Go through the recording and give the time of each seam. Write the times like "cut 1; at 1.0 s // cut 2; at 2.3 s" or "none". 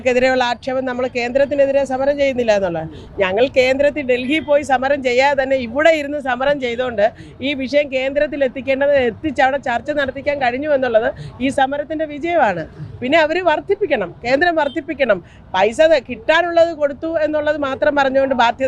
none